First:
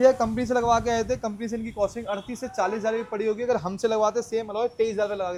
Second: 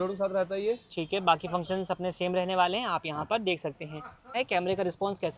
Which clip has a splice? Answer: second; 1 cut; at 4.3 s

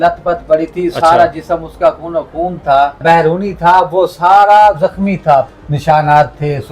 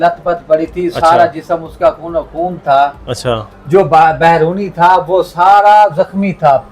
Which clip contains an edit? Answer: first; 2 cuts; at 3.0 s, 5.5 s

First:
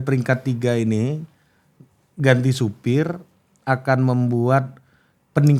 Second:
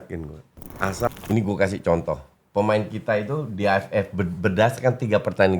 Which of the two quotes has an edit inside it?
second; 1 cut; at 1.1 s

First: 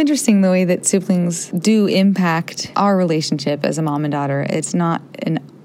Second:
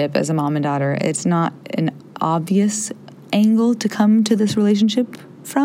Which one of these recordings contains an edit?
first; 2 cuts; at 1.4 s, 2.6 s

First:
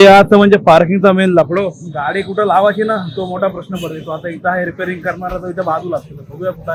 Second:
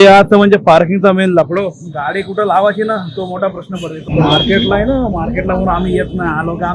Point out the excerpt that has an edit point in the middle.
second; 1 cut; at 4.0 s

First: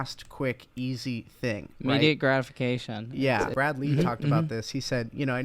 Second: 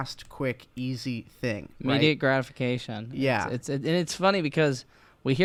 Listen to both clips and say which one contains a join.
first; 1 cut; at 3.5 s

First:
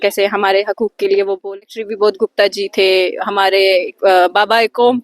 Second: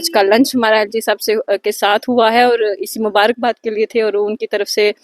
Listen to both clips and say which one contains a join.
first; 1 cut; at 1.6 s

